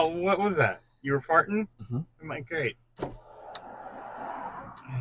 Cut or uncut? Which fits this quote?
uncut